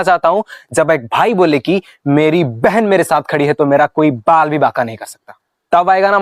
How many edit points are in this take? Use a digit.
0